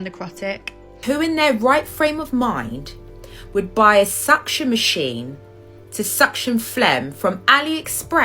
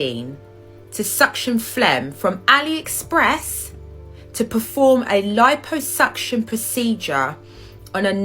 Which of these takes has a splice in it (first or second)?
first